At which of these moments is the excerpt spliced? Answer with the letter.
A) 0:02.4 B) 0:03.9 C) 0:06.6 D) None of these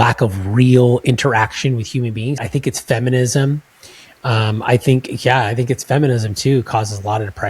A